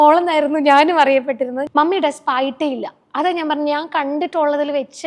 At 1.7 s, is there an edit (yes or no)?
yes